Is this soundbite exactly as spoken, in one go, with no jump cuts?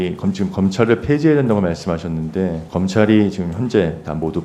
yes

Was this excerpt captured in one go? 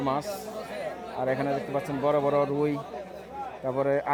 yes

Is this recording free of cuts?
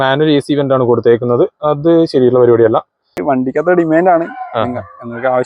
no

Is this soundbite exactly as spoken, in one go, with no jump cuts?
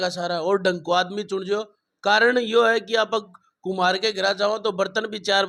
yes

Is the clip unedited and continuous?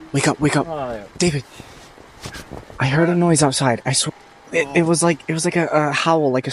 yes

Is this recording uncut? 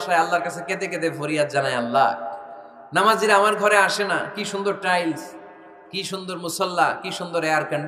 yes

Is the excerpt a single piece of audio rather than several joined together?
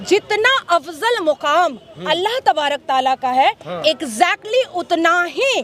yes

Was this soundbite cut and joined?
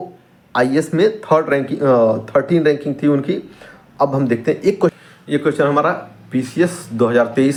no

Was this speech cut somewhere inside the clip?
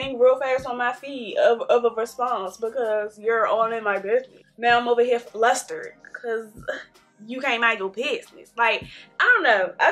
no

